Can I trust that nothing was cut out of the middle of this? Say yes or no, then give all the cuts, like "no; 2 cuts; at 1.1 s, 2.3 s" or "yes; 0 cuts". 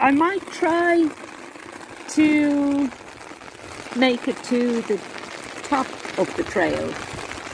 yes; 0 cuts